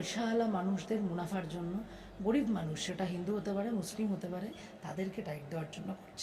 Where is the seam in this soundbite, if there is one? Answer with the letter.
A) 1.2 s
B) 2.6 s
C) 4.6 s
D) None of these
C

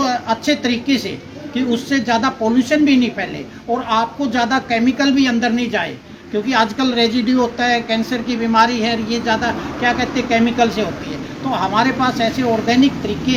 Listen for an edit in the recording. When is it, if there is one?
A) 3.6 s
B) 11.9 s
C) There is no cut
C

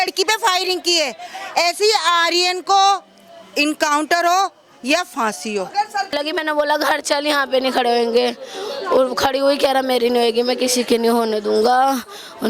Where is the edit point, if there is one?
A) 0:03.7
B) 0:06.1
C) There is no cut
B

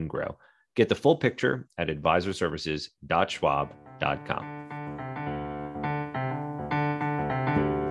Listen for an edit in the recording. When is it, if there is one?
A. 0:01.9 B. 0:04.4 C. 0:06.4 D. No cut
B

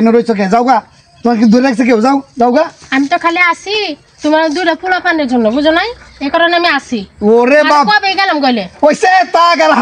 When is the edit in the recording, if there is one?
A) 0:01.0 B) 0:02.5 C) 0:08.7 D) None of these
D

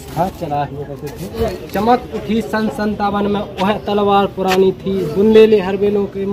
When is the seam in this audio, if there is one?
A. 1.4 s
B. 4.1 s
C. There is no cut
A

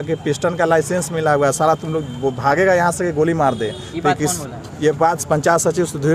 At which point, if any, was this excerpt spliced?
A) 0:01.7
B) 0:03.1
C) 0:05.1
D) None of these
D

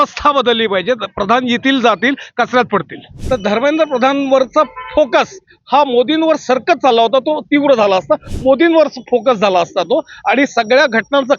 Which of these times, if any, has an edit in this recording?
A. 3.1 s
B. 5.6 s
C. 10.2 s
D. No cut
A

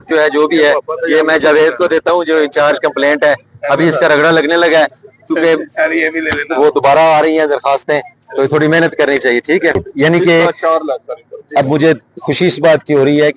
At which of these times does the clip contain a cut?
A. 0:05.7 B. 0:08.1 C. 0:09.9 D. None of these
C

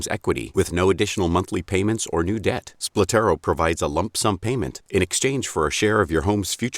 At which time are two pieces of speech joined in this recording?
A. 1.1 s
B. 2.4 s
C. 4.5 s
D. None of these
C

